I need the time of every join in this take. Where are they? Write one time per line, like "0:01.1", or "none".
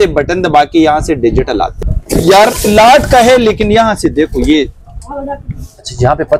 0:01.7